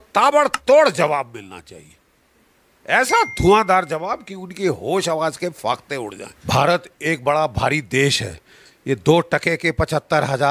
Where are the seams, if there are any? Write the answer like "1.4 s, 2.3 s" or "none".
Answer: 6.3 s

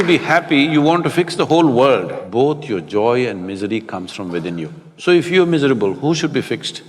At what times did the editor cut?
2.2 s, 4.8 s

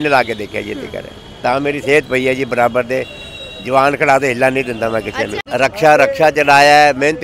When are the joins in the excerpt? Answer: 5.4 s

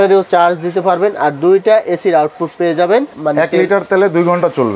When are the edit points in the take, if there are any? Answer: 3.1 s

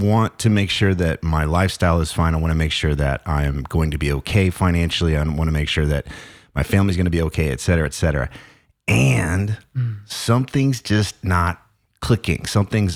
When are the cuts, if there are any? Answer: none

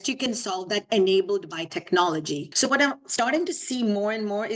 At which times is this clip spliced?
2.5 s

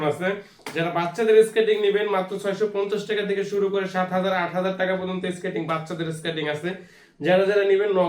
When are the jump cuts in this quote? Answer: none

